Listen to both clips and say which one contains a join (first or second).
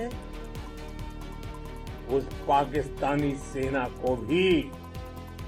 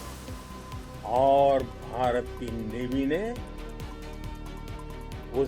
second